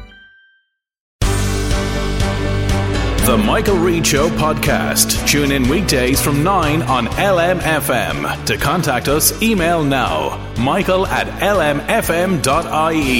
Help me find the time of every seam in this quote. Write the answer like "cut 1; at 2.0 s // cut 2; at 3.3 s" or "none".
cut 1; at 1.1 s